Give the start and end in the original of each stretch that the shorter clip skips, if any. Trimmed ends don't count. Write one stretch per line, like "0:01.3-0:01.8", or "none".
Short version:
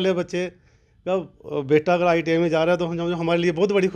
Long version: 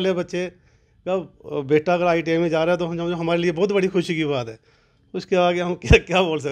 none